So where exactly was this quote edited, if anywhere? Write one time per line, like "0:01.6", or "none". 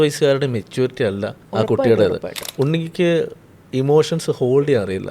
0:01.4
0:02.4